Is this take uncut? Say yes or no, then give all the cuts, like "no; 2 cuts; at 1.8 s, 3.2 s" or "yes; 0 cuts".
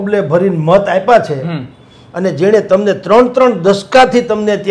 yes; 0 cuts